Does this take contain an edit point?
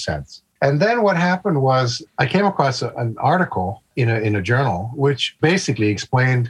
yes; 1 cut; at 2.9 s

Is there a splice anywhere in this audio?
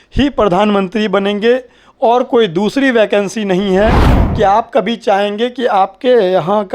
yes; 1 cut; at 4.2 s

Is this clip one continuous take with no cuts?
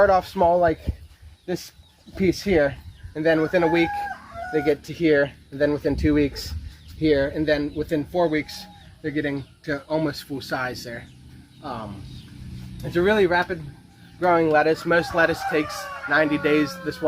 yes; 0 cuts

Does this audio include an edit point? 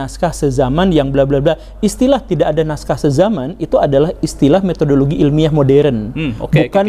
no; 0 cuts

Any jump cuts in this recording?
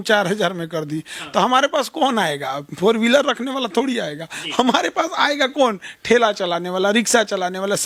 no; 0 cuts

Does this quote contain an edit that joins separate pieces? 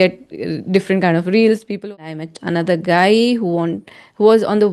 yes; 1 cut; at 1.9 s

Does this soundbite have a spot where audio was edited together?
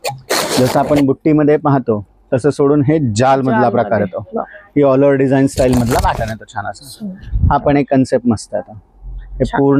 no; 0 cuts

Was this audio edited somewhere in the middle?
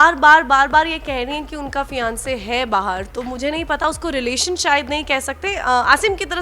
no; 0 cuts

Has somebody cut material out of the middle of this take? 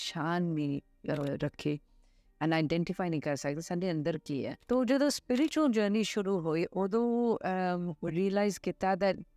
yes; 1 cut; at 4.6 s

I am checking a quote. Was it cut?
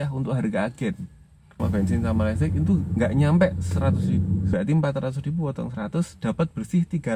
yes; 2 cuts; at 1.6 s, 4.5 s

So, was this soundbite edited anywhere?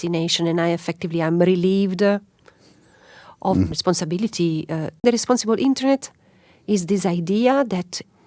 yes; 1 cut; at 4.9 s

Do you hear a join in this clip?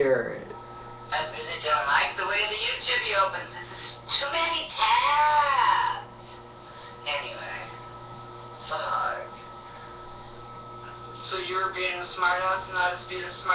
yes; 1 cut; at 1.7 s

